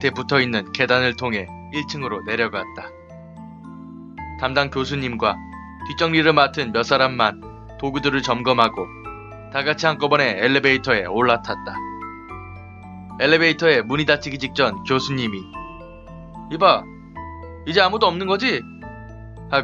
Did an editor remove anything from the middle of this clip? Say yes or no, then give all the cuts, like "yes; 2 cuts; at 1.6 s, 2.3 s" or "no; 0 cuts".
no; 0 cuts